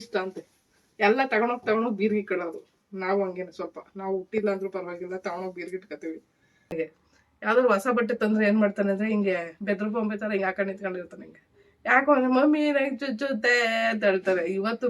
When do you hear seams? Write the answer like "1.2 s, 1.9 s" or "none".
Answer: 6.7 s

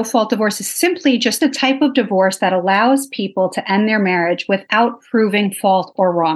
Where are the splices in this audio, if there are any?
1.4 s

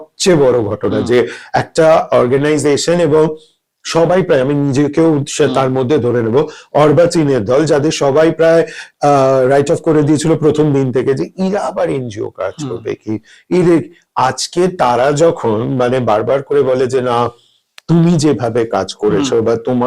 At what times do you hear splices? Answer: none

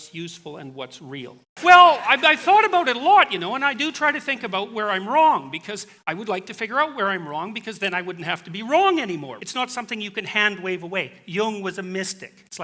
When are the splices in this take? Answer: 1.4 s, 9.3 s

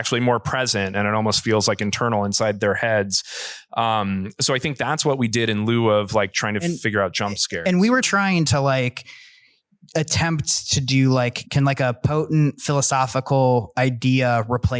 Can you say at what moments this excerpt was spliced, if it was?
8.4 s, 11.4 s

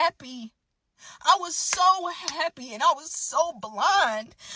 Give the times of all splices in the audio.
none

